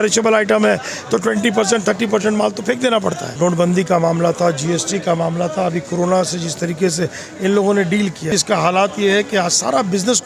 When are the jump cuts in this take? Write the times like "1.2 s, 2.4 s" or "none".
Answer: 3.3 s, 8.3 s